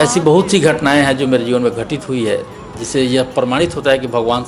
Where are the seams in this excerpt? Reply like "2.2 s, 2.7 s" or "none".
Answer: none